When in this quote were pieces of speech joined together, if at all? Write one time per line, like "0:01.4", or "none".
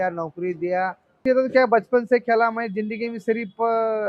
0:01.2